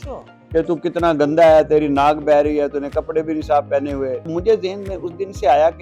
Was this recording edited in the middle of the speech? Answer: yes; 1 cut; at 4.3 s

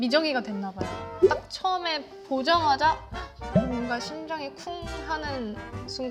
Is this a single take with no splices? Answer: yes; 0 cuts

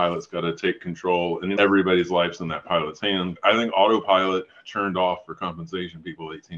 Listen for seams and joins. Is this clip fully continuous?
no; 1 cut; at 3.3 s

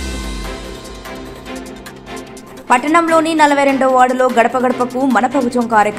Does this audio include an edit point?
no; 0 cuts

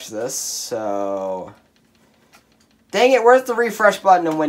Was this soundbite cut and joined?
no; 0 cuts

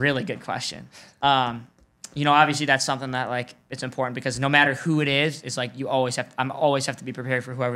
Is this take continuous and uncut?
yes; 0 cuts

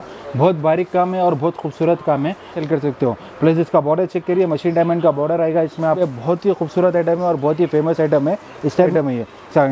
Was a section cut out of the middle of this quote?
yes; 3 cuts; at 2.5 s, 6.0 s, 8.9 s

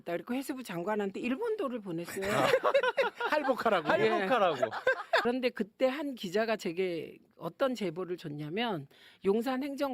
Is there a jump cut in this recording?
yes; 1 cut; at 5.2 s

